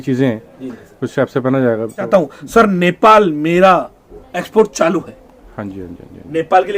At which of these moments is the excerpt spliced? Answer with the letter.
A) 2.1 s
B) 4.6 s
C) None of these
A